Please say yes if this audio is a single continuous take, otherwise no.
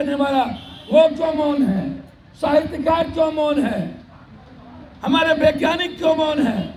yes